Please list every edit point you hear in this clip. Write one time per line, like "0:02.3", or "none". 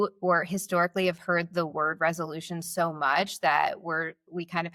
none